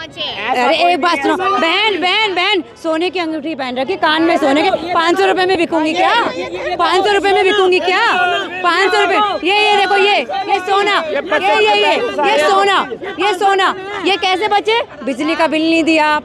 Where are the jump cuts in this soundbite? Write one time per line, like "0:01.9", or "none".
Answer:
none